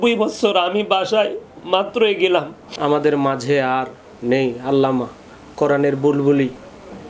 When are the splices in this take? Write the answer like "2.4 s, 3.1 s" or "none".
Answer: 2.7 s